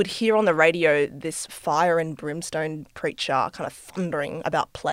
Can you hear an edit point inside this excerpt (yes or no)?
no